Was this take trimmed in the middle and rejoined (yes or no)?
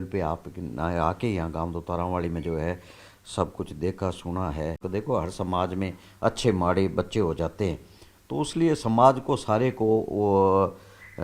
yes